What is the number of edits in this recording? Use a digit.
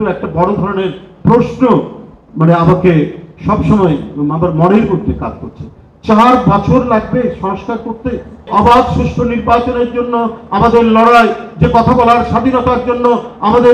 1